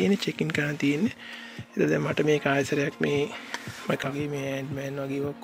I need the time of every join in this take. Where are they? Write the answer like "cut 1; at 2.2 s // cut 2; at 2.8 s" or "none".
cut 1; at 4.0 s

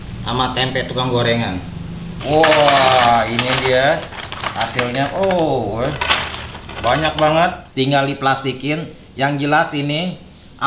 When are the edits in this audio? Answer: cut 1; at 2.2 s

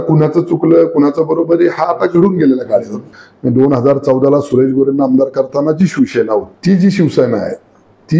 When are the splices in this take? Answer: cut 1; at 3.0 s // cut 2; at 6.5 s

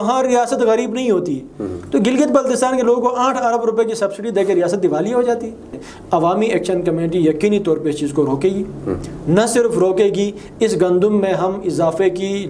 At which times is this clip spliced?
cut 1; at 5.9 s

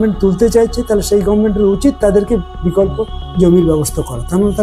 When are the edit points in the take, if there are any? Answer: none

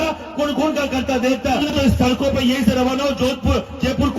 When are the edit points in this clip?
cut 1; at 1.7 s

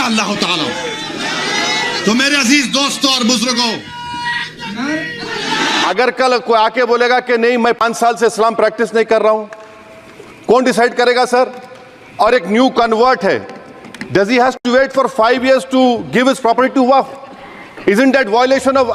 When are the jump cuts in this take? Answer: cut 1; at 5.8 s

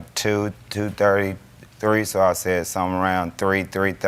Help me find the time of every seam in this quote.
none

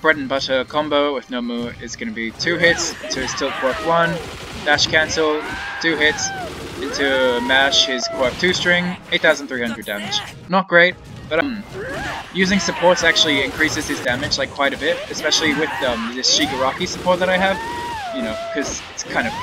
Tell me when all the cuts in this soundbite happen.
cut 1; at 11.4 s

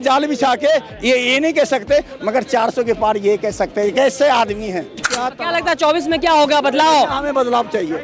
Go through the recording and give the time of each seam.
cut 1; at 5.1 s

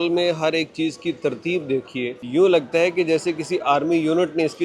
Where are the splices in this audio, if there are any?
cut 1; at 2.2 s

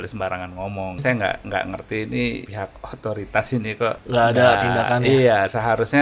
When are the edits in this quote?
cut 1; at 1.0 s // cut 2; at 2.5 s // cut 3; at 4.0 s

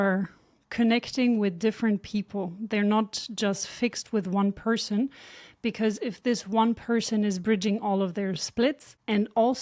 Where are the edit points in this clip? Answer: none

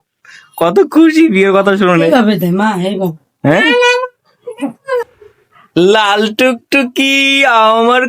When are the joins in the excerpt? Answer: cut 1; at 5.1 s

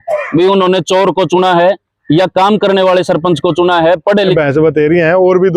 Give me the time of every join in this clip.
cut 1; at 4.3 s

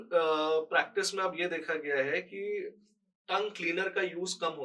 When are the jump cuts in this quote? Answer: none

